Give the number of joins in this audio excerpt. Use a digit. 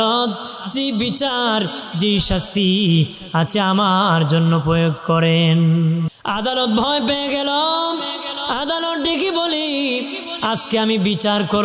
1